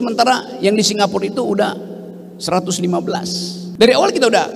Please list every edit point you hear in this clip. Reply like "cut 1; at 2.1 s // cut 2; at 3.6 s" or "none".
cut 1; at 3.6 s